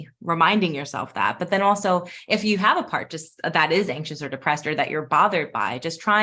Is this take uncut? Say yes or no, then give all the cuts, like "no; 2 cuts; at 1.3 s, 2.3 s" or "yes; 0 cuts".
yes; 0 cuts